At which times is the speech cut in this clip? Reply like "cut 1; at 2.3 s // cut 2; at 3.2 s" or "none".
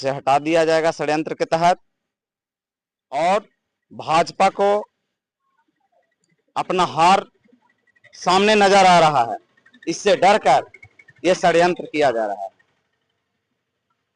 none